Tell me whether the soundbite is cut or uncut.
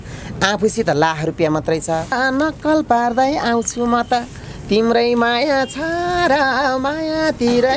cut